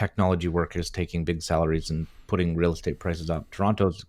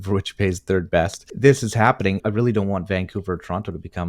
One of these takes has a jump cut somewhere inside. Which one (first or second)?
second